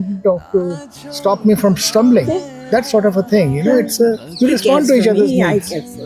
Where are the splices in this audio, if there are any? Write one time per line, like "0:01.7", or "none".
none

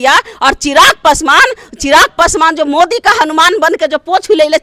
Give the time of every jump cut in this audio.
none

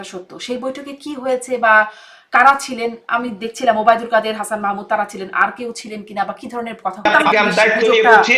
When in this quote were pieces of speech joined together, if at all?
0:07.1

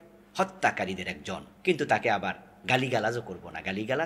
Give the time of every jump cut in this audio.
0:01.5

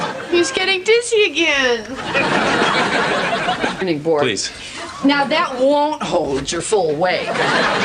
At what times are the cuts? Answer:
none

